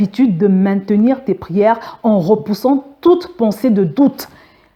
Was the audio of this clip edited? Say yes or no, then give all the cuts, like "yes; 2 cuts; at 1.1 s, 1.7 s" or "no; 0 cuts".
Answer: no; 0 cuts